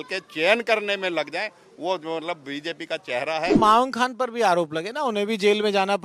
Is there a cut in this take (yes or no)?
yes